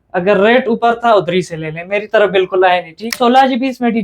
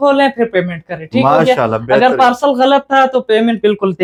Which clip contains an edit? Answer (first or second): first